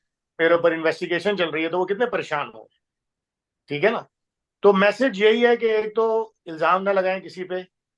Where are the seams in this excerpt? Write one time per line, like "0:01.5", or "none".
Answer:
none